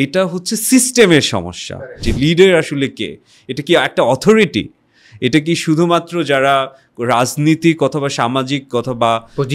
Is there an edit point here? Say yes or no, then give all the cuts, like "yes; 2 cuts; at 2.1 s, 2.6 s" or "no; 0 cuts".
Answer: yes; 1 cut; at 1.8 s